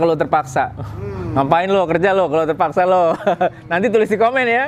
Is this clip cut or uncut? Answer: uncut